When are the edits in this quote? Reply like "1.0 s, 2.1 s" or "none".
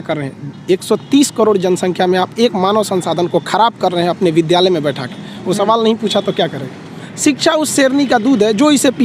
7.0 s